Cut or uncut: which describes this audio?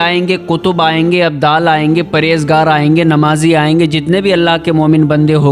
uncut